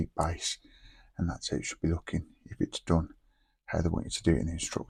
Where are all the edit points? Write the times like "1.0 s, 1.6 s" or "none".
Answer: none